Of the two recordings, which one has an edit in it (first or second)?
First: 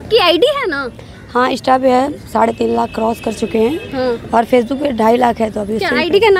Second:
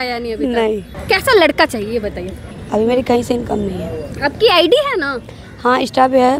second